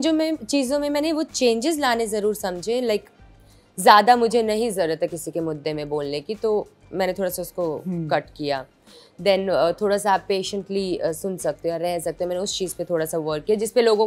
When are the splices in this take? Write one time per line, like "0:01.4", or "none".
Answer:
none